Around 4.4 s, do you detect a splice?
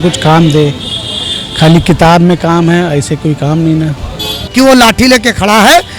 yes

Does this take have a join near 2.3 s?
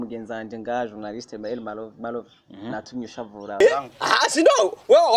no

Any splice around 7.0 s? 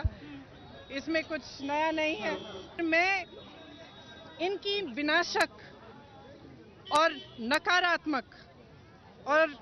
no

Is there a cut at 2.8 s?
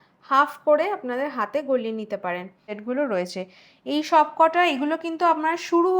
yes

